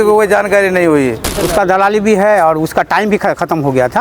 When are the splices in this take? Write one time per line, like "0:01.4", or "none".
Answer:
0:01.3